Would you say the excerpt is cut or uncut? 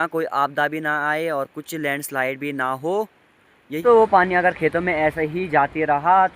cut